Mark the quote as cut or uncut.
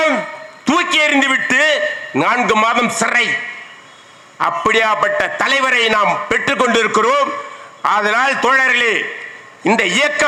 uncut